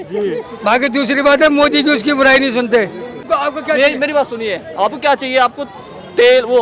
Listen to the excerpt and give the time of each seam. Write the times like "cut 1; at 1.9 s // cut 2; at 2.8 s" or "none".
cut 1; at 3.3 s